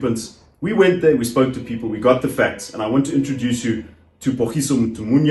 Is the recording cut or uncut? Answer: uncut